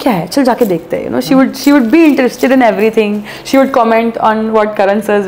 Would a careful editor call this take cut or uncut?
uncut